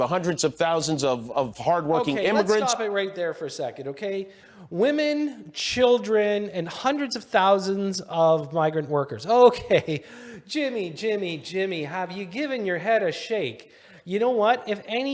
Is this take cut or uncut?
uncut